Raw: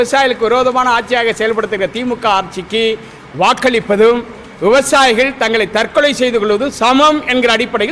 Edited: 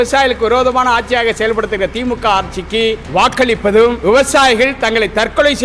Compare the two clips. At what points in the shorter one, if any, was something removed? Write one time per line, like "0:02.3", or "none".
0:03.0
0:04.0